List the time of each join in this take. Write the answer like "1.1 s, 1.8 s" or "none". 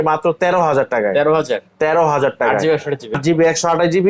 3.1 s